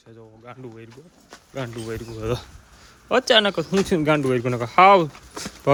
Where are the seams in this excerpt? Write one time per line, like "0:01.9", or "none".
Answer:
none